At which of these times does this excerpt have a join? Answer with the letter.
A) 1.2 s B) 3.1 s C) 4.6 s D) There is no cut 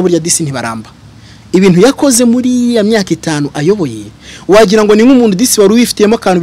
D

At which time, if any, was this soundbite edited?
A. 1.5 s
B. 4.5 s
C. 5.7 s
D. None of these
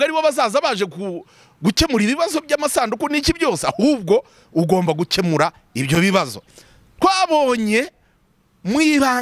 D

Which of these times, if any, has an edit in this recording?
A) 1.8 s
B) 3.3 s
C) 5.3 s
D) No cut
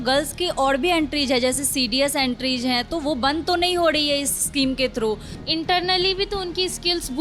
C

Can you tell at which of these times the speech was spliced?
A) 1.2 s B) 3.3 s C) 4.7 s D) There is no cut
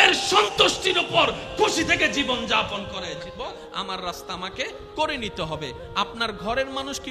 B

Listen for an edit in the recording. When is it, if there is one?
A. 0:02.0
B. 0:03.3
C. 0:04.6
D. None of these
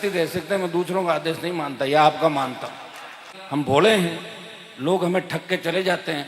B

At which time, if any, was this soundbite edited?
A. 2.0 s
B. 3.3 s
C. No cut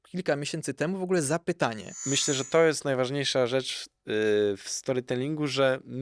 A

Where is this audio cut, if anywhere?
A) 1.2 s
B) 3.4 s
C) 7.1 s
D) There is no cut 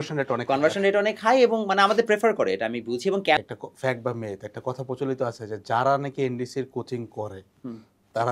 B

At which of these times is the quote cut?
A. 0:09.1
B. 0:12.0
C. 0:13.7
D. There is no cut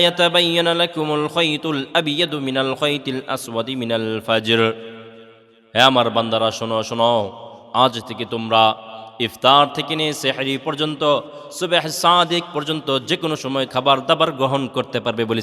C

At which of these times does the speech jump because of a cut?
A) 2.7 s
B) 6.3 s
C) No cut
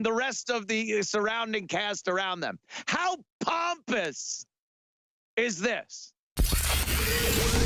B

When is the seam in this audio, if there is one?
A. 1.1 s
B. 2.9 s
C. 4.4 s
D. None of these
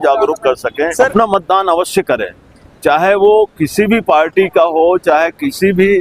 A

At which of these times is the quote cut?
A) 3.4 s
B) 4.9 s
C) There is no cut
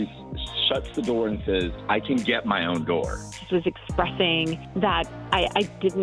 A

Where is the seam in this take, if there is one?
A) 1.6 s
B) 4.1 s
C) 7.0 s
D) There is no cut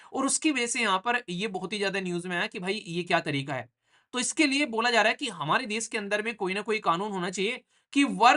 D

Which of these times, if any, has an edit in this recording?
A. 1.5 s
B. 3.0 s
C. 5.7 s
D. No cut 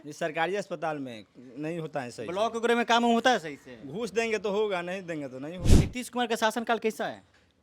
C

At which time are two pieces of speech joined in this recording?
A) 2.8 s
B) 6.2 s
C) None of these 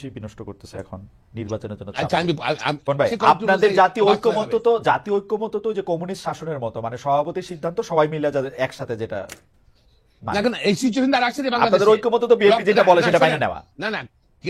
A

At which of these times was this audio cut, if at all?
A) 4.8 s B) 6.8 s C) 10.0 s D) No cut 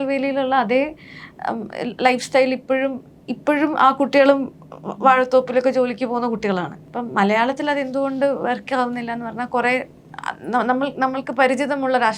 B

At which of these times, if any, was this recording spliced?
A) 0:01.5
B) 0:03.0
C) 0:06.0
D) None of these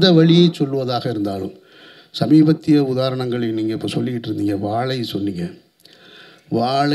D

